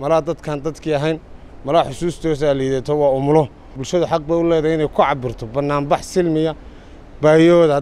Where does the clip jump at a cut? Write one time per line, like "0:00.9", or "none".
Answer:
0:03.8